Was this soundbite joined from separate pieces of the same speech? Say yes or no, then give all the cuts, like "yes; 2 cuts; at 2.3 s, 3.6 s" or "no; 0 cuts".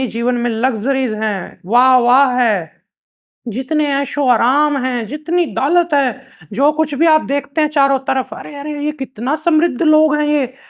no; 0 cuts